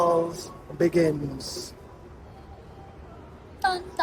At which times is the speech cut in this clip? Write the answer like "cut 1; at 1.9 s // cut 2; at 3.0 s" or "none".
none